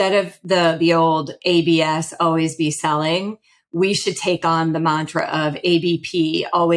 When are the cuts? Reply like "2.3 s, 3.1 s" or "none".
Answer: none